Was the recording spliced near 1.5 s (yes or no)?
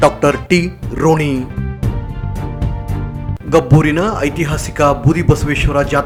no